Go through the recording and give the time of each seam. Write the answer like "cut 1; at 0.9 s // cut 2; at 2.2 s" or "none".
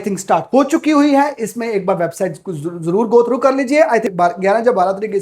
cut 1; at 4.1 s